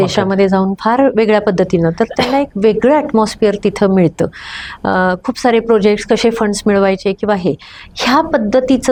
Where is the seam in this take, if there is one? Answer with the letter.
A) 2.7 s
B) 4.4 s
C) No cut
C